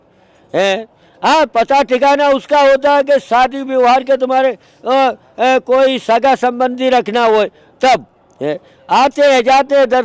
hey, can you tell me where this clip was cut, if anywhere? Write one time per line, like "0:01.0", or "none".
none